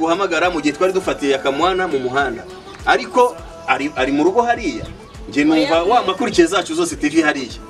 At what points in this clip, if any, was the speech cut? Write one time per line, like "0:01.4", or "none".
0:06.1